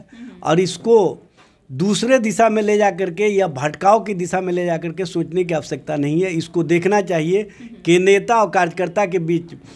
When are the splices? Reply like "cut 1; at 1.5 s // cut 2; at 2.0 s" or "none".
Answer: none